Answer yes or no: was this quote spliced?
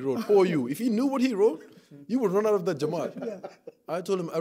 no